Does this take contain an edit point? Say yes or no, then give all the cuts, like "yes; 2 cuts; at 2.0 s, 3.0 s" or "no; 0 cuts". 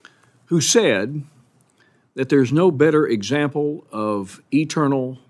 no; 0 cuts